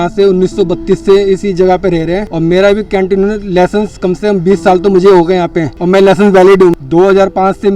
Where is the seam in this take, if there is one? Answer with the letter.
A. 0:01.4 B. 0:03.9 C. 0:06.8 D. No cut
C